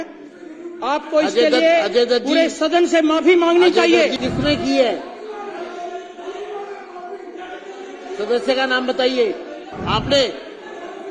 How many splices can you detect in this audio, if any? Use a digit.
2